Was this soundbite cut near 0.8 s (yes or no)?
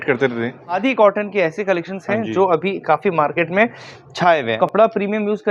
yes